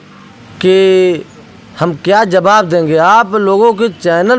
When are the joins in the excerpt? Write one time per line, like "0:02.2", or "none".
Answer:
none

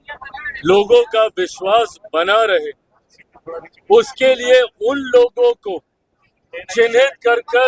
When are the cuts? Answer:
none

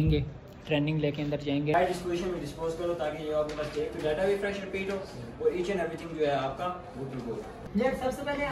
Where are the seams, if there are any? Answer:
0:01.7
0:07.6

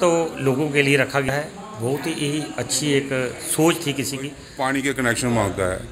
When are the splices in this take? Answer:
0:01.3
0:04.4

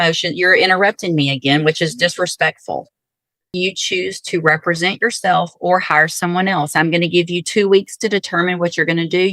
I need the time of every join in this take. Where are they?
0:03.4

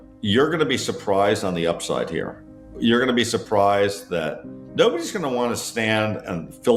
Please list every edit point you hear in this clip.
none

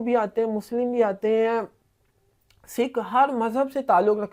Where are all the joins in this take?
none

